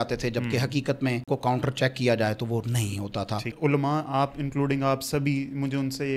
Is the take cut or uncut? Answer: cut